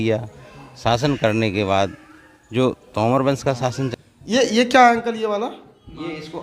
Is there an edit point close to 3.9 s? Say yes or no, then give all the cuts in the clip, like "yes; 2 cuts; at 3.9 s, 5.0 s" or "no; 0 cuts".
yes; 1 cut; at 3.9 s